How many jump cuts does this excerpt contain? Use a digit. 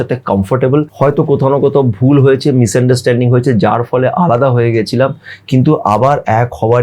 1